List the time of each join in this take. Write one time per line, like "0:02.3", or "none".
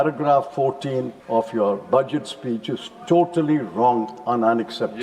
0:01.2